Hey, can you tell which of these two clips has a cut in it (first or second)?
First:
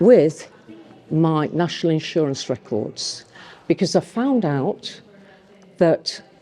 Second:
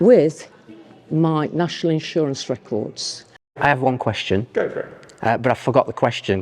second